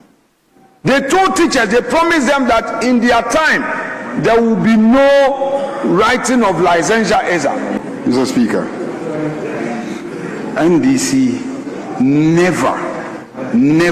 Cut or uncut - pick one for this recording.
cut